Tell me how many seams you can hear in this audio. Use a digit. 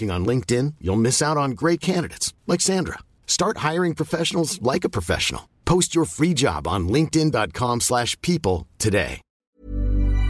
1